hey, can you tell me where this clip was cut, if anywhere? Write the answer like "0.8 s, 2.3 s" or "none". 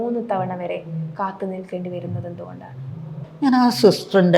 1.1 s